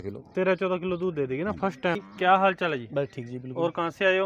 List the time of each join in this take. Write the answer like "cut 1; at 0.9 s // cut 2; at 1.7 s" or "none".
cut 1; at 2.0 s